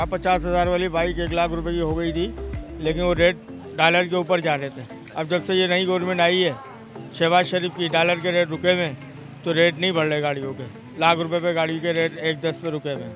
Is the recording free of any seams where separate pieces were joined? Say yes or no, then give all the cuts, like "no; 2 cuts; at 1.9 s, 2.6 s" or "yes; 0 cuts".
yes; 0 cuts